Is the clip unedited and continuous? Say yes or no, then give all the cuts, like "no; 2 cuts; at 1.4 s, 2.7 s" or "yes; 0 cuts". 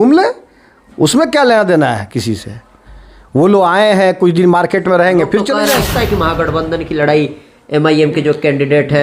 no; 1 cut; at 5.9 s